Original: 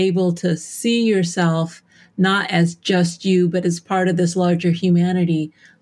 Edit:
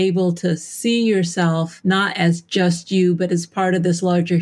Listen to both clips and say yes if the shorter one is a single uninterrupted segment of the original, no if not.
no